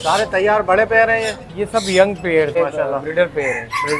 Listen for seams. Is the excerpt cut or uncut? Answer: cut